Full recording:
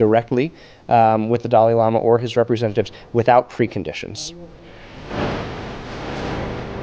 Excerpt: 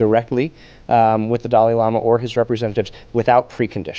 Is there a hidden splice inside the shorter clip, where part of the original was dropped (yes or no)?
no